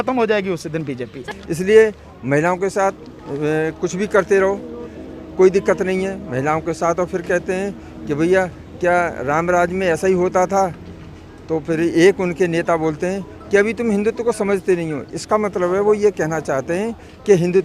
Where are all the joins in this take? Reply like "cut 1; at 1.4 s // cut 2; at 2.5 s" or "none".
cut 1; at 1.2 s